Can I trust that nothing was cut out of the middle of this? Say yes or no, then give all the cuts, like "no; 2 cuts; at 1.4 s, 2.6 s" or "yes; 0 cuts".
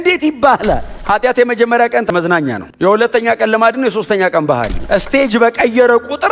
no; 2 cuts; at 0.9 s, 2.1 s